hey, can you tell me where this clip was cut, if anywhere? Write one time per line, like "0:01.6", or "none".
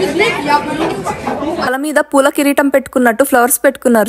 0:01.7